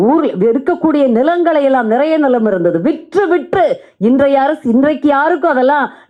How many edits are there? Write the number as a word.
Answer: zero